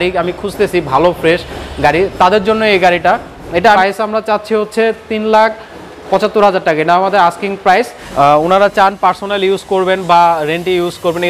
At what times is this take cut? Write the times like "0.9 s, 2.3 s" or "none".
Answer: 3.6 s, 8.0 s

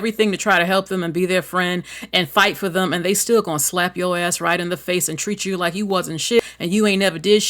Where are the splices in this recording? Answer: 6.4 s

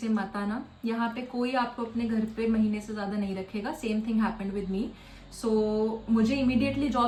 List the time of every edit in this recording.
none

